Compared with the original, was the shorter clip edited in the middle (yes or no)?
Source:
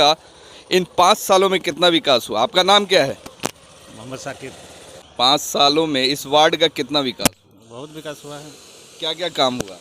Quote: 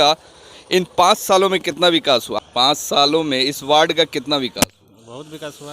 yes